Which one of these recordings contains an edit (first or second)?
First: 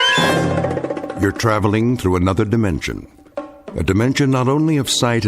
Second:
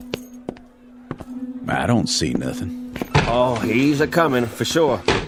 first